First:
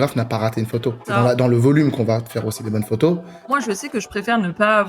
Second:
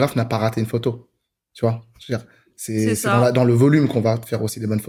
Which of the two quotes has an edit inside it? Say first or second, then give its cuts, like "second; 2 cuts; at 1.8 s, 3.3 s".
first; 2 cuts; at 1.1 s, 3.5 s